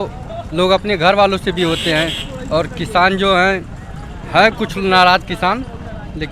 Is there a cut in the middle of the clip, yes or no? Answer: no